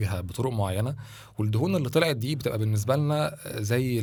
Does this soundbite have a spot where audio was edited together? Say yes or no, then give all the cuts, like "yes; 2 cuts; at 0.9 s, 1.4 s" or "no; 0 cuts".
no; 0 cuts